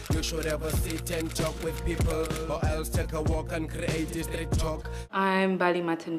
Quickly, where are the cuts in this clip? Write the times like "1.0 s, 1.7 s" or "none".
4.9 s